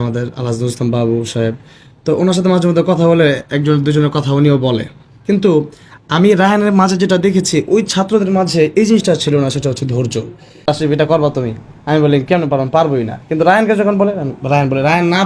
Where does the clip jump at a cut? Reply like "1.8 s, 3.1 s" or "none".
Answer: 10.6 s

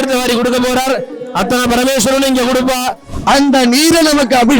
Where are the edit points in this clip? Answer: 3.1 s

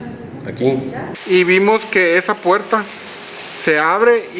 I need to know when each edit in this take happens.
1.1 s

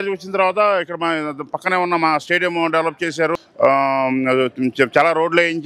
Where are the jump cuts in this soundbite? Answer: 3.4 s

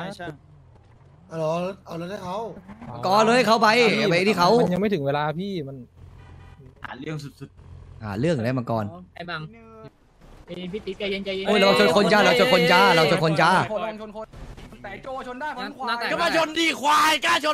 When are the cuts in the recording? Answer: 9.9 s

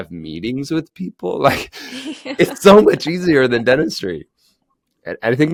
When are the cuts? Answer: none

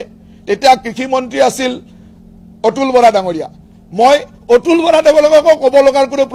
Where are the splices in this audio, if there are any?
none

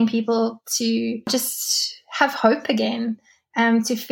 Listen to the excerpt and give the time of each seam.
1.3 s

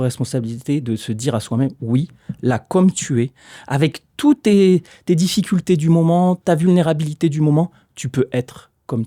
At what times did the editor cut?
none

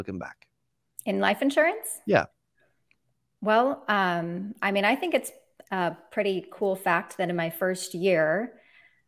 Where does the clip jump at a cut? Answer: none

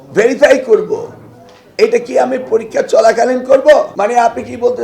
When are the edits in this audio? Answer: 3.9 s

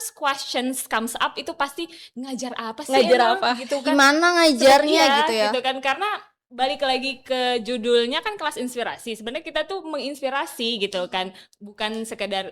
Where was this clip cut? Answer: none

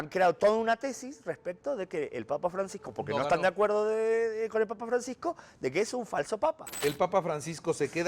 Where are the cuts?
6.7 s

